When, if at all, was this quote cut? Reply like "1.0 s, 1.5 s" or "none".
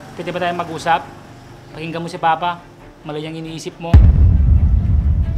3.9 s